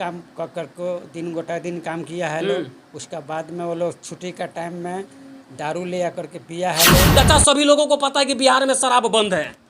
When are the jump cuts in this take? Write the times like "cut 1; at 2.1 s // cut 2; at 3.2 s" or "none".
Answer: cut 1; at 7.1 s